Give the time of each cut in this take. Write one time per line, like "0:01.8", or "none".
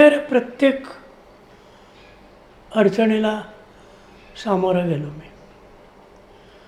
none